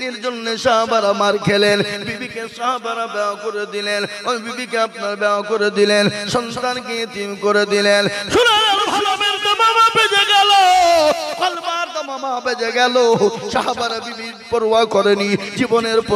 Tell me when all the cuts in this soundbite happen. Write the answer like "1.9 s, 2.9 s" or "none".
9.2 s